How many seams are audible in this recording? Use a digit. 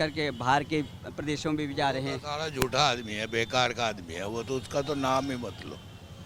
0